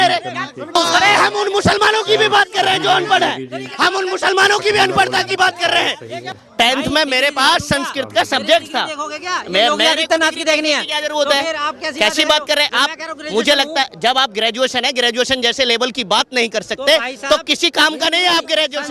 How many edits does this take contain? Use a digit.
2